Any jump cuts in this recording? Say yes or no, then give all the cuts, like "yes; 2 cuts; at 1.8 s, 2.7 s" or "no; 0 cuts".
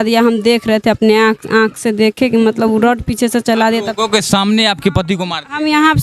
no; 0 cuts